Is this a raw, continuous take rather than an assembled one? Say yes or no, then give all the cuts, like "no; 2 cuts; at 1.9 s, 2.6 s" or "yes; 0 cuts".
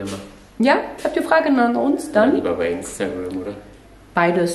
yes; 0 cuts